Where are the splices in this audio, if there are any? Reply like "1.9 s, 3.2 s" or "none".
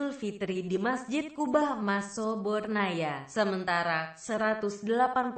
3.3 s